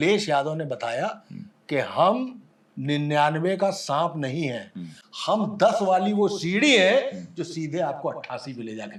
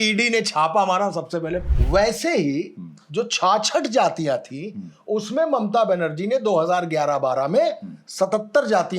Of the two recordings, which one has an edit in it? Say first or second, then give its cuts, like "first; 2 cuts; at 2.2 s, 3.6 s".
second; 1 cut; at 1.6 s